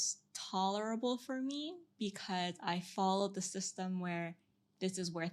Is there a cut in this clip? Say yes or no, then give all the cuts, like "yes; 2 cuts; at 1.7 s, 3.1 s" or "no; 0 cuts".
no; 0 cuts